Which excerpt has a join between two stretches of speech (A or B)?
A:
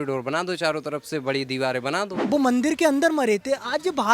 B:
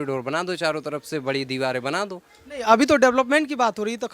A